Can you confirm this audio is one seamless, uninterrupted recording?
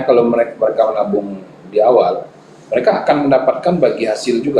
yes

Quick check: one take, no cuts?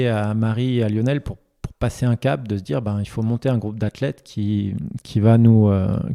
yes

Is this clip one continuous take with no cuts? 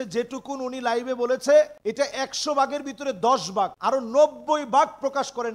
no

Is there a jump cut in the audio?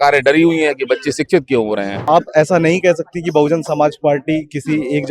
yes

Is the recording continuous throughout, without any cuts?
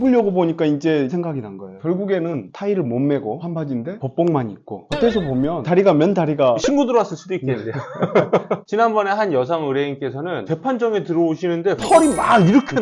no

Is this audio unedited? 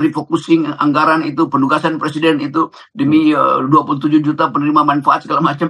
yes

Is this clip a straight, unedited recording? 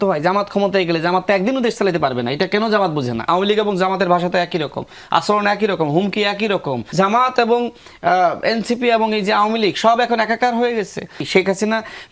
no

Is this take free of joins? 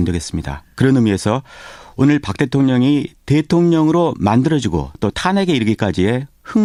yes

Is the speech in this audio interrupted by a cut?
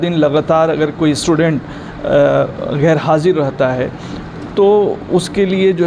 no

